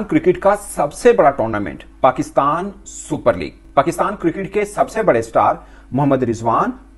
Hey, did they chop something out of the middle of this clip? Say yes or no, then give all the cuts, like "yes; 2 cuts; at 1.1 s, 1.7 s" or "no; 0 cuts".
no; 0 cuts